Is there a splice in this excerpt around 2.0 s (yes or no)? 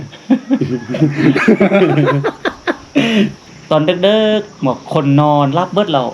no